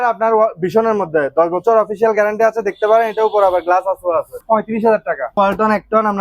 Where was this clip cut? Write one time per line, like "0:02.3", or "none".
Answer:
0:04.4
0:05.4